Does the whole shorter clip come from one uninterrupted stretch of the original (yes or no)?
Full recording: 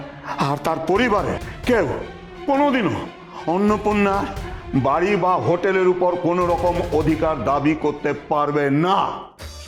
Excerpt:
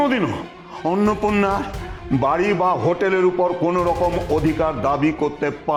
yes